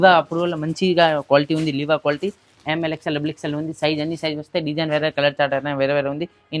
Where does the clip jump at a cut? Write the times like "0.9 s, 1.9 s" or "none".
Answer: none